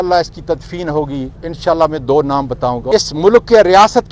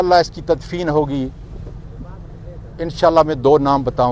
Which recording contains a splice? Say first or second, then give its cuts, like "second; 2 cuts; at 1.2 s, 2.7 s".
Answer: first; 2 cuts; at 1.4 s, 2.8 s